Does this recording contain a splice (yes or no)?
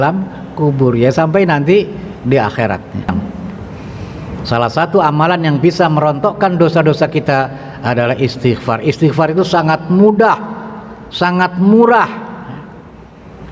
yes